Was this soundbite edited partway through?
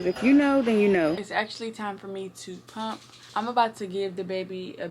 yes; 2 cuts; at 1.2 s, 3.1 s

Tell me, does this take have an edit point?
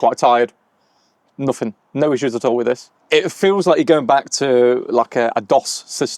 yes; 1 cut; at 2.9 s

